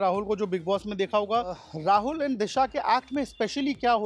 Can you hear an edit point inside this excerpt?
yes; 1 cut; at 1.7 s

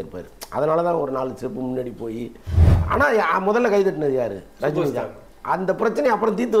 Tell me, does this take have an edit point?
yes; 1 cut; at 2.6 s

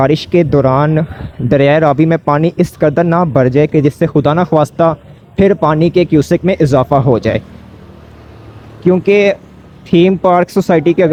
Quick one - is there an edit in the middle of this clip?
no; 0 cuts

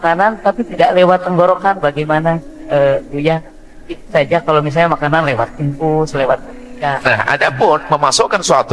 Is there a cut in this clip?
yes; 1 cut; at 7.0 s

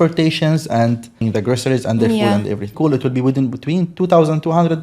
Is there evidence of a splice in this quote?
yes; 2 cuts; at 1.2 s, 2.7 s

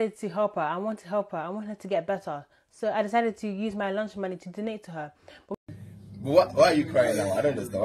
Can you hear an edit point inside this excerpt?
yes; 1 cut; at 5.5 s

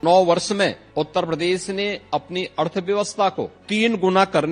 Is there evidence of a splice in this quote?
yes; 2 cuts; at 0.8 s, 3.6 s

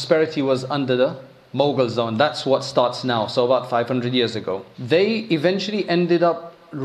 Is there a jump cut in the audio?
yes; 1 cut; at 4.7 s

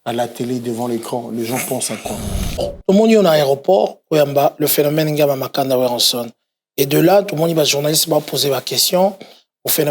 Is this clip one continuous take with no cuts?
no; 1 cut; at 2.7 s

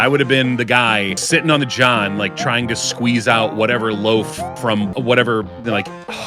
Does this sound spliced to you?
yes; 2 cuts; at 1.2 s, 4.9 s

